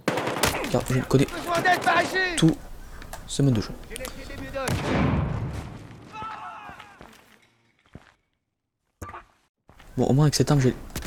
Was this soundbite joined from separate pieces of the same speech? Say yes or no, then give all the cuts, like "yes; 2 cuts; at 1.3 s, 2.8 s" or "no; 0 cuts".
no; 0 cuts